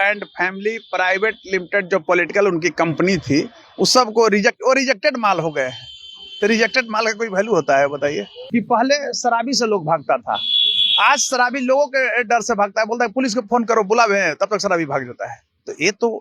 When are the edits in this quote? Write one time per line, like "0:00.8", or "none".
0:08.4